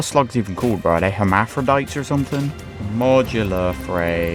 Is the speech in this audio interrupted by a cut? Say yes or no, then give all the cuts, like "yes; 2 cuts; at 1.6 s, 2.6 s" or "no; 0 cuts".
no; 0 cuts